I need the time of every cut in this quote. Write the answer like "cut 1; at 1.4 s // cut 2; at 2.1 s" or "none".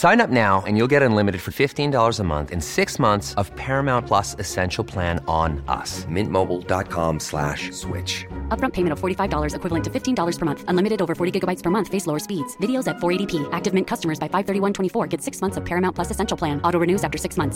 none